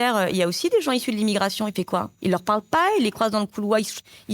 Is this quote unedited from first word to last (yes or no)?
no